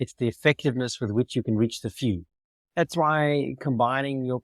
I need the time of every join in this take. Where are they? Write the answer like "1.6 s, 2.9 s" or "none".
2.6 s